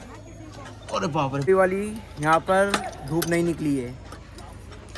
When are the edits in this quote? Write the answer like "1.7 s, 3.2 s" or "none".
1.5 s